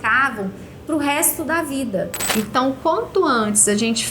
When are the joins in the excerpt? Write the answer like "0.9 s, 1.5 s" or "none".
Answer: 2.2 s